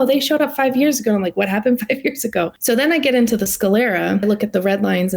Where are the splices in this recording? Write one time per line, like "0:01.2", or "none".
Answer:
0:02.5
0:04.2

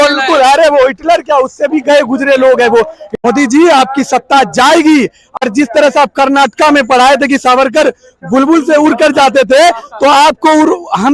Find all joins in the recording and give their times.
0:03.0
0:05.4

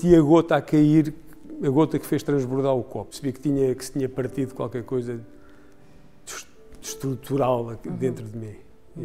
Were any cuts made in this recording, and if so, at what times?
0:03.1

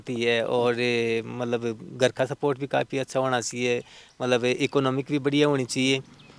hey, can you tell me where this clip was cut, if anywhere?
none

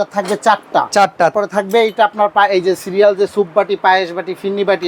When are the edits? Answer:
0:01.3

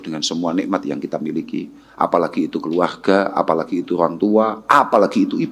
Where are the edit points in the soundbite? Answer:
none

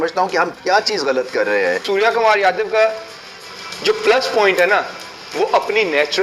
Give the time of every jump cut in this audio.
0:01.8

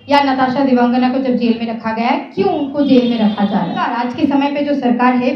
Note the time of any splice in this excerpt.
0:04.0

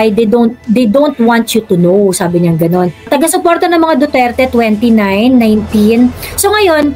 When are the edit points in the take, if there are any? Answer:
0:03.1

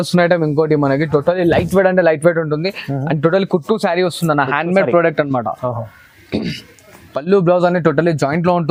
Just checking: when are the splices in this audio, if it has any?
none

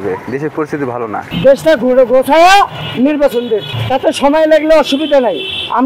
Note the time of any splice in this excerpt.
0:01.2
0:02.8
0:03.7

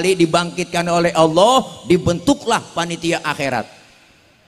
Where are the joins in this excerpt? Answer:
none

